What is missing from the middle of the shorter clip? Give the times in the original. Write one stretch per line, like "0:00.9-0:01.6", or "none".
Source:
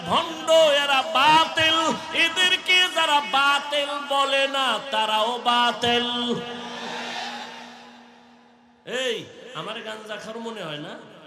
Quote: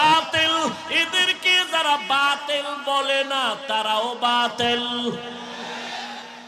none